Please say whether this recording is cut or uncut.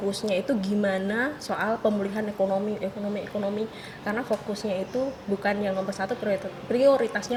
uncut